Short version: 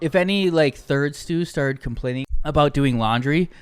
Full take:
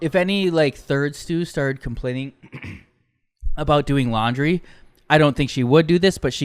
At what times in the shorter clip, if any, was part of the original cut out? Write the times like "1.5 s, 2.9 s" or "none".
2.3 s